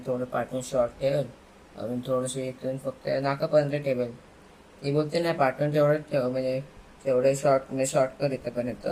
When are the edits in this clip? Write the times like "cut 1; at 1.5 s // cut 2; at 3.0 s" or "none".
none

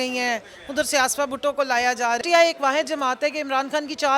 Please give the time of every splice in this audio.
cut 1; at 2.2 s

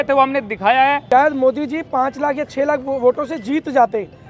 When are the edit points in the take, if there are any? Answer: cut 1; at 1.0 s

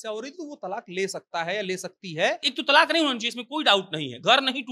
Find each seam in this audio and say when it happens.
cut 1; at 2.5 s

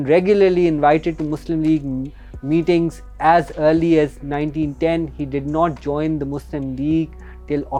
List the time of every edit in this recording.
none

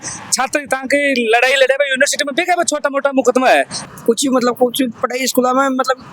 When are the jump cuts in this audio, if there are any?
cut 1; at 3.8 s

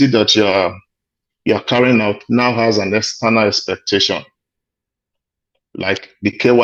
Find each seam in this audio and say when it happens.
none

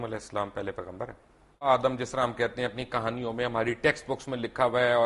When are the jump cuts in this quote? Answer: cut 1; at 1.7 s

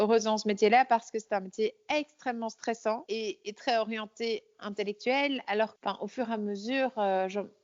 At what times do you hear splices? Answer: cut 1; at 3.0 s // cut 2; at 5.7 s

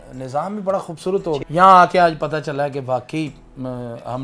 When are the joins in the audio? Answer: cut 1; at 1.4 s

